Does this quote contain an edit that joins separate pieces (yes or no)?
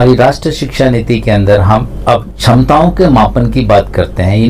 yes